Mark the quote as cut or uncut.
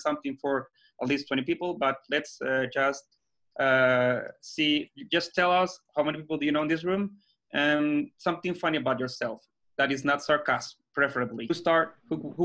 cut